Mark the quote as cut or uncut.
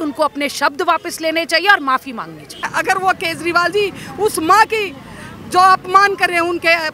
cut